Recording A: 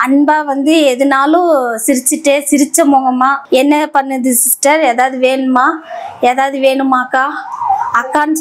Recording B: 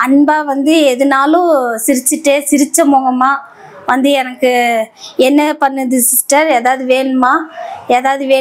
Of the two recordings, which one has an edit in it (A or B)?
A